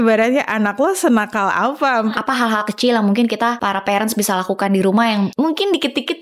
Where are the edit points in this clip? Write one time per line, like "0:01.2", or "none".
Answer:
0:02.0
0:03.6
0:05.3